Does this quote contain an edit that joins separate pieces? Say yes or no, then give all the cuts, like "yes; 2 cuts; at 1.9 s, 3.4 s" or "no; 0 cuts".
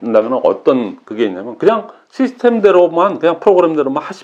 no; 0 cuts